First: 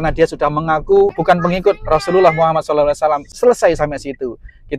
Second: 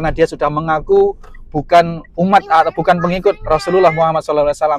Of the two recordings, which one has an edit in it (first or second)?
first